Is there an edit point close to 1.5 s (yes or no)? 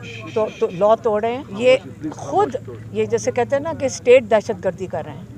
yes